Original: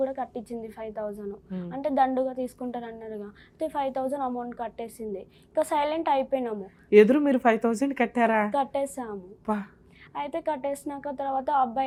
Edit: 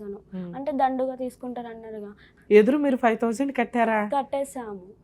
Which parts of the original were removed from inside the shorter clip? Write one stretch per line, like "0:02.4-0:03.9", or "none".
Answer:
0:03.4-0:06.7

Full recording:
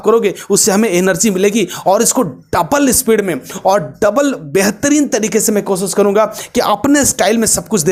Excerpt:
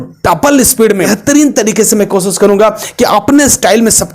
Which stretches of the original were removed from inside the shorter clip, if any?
0:03.4-0:04.7

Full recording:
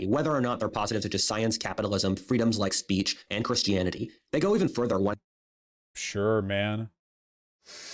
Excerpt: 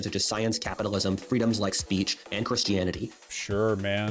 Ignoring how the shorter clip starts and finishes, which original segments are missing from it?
0:04.1-0:05.8

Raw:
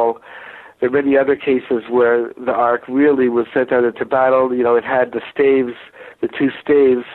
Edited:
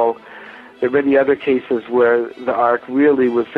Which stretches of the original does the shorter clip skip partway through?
none

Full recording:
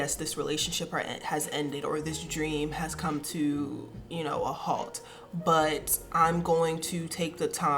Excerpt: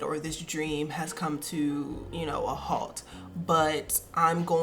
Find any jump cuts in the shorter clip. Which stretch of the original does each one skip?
0:03.8-0:04.0

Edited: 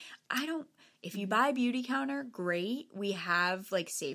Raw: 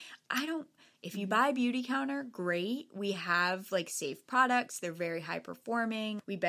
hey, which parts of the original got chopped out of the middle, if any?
none

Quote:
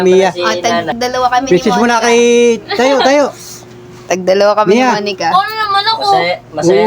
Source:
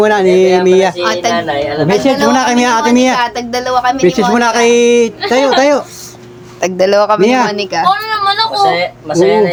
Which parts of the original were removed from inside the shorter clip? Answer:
0:01.5-0:03.4

